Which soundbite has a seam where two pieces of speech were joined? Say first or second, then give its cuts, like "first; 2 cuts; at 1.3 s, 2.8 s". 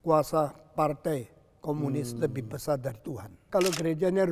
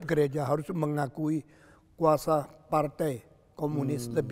first; 1 cut; at 3.4 s